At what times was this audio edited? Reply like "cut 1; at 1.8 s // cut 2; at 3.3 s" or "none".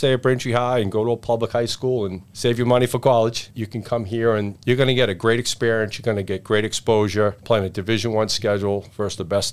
cut 1; at 2.2 s // cut 2; at 4.5 s // cut 3; at 7.4 s